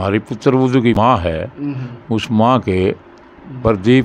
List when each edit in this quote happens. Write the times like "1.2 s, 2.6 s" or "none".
1.0 s